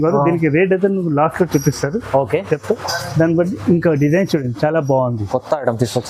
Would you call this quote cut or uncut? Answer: uncut